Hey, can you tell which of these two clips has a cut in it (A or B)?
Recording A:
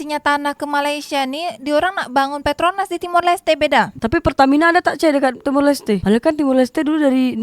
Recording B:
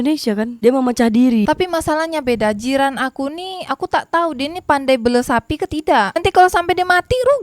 B